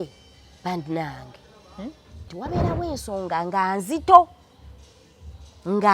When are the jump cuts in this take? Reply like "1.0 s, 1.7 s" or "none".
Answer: 2.3 s